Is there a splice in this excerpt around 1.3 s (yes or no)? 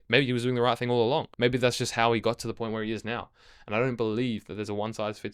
yes